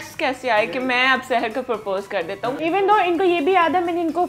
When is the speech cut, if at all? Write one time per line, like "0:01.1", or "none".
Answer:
0:02.6